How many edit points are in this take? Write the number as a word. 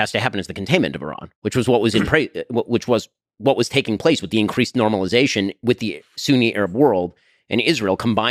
zero